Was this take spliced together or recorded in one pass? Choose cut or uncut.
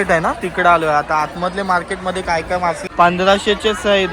cut